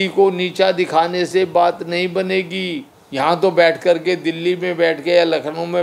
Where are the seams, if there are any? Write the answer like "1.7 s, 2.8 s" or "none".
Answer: 2.9 s